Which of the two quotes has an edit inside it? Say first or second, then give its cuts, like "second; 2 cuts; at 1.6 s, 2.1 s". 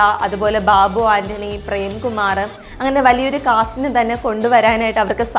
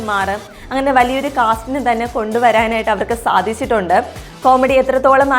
second; 1 cut; at 4.2 s